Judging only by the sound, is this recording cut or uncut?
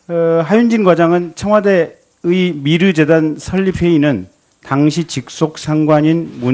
uncut